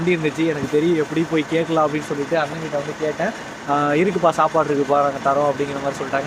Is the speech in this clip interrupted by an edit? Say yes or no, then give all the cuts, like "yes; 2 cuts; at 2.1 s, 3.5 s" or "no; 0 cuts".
no; 0 cuts